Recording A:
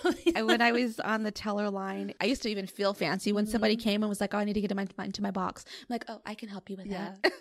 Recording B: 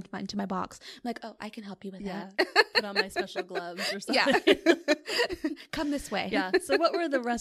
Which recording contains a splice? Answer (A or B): A